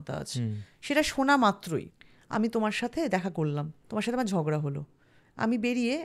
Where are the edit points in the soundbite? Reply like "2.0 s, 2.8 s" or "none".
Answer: 2.0 s, 3.7 s